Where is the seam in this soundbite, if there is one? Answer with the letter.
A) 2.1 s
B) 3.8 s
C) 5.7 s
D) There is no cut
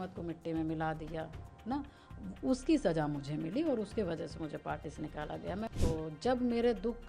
C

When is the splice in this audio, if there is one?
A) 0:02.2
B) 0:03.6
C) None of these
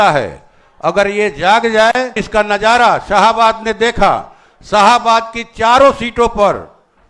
A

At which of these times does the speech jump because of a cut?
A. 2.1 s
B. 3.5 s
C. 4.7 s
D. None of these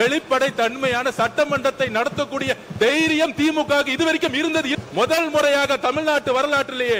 C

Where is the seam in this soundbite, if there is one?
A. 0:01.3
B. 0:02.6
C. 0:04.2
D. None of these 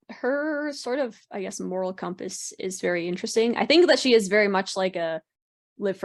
D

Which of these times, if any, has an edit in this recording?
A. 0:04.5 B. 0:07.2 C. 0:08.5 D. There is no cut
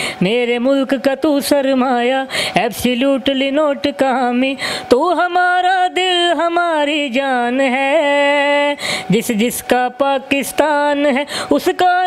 D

